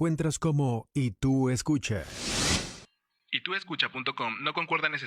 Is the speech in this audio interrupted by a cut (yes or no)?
yes